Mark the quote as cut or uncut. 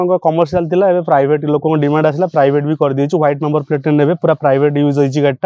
uncut